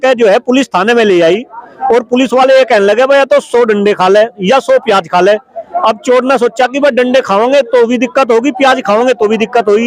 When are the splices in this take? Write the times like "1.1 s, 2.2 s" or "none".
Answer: none